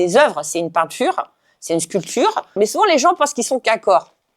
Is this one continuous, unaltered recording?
no; 1 cut; at 2.6 s

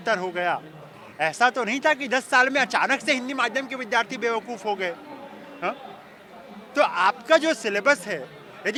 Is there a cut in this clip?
no; 0 cuts

